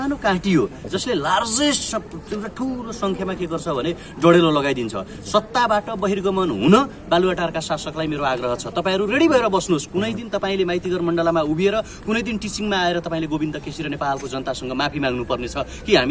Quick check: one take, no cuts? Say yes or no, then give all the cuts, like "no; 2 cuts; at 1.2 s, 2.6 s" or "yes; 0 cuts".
yes; 0 cuts